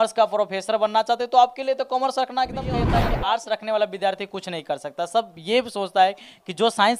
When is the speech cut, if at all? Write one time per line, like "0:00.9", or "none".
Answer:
0:03.1